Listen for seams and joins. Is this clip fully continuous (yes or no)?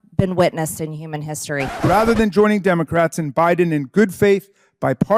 no